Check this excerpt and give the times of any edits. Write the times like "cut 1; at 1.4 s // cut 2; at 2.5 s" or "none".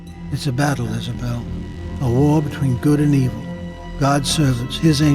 cut 1; at 2.0 s

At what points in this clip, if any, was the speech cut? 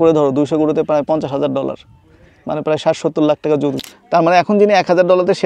cut 1; at 3.9 s

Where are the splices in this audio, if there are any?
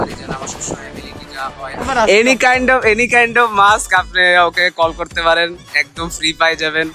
cut 1; at 1.8 s

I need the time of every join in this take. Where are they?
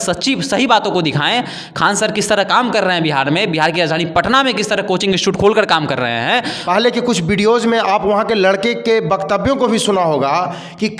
cut 1; at 6.6 s

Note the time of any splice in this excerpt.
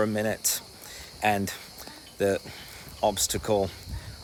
none

